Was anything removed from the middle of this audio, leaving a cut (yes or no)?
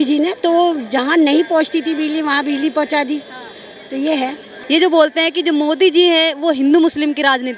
yes